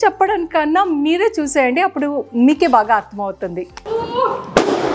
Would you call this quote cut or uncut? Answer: cut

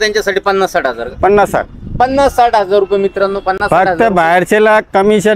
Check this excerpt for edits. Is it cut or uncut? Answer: uncut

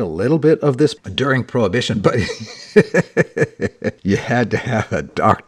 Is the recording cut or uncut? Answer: cut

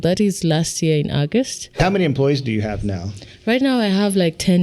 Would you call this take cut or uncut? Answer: cut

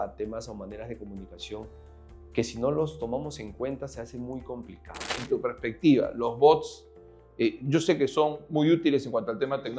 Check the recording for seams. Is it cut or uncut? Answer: cut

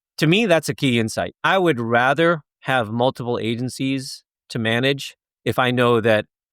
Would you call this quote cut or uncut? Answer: cut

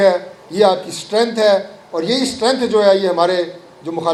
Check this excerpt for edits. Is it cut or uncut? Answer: uncut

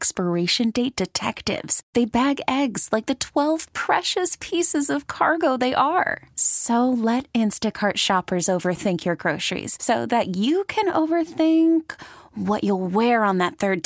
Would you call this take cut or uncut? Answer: uncut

